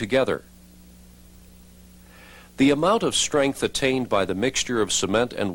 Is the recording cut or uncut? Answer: uncut